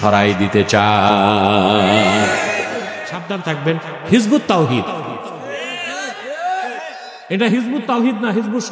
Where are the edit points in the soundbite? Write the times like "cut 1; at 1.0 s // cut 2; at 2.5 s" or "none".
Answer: cut 1; at 3.3 s